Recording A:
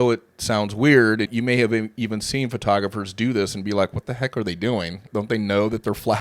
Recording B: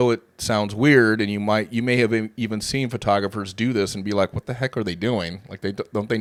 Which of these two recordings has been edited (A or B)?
A